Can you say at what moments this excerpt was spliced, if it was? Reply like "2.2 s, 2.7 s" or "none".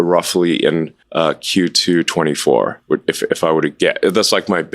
1.0 s